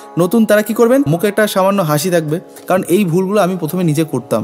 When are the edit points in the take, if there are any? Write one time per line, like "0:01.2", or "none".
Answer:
0:01.1